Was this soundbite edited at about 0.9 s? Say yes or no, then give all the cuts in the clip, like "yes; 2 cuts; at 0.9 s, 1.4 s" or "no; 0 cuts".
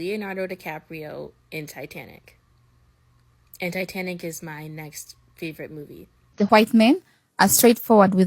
no; 1 cut; at 6.3 s